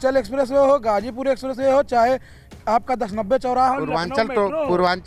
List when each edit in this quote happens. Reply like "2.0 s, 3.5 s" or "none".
none